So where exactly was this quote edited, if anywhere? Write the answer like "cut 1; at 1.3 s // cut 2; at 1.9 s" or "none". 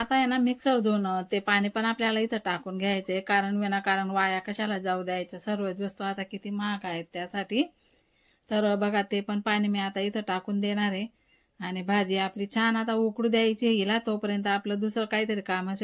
none